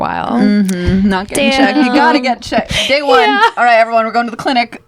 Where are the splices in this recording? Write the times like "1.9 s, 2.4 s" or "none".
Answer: none